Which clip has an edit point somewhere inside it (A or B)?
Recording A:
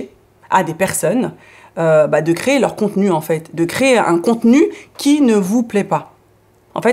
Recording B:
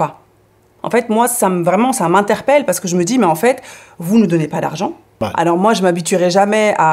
B